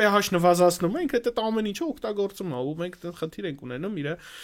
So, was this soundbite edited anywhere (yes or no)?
no